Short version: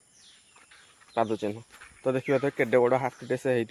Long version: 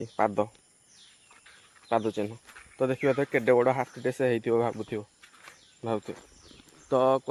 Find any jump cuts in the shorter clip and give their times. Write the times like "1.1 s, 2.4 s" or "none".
none